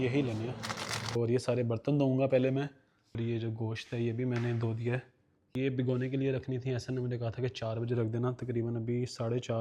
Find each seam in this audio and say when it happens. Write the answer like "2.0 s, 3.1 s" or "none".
1.1 s, 3.1 s, 5.5 s